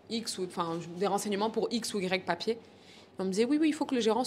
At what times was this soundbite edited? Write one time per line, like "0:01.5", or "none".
none